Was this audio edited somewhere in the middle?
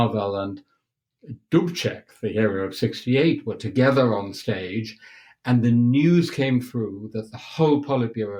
no; 0 cuts

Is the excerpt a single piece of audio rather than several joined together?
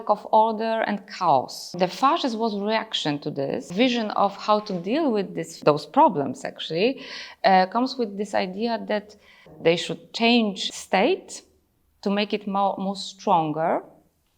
no; 5 cuts; at 1.7 s, 3.7 s, 5.5 s, 9.5 s, 10.6 s

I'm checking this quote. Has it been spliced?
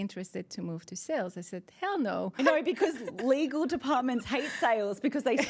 yes; 1 cut; at 2.4 s

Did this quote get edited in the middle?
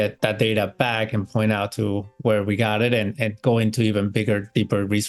no; 0 cuts

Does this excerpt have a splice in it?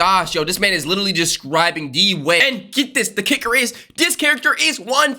yes; 1 cut; at 2.4 s

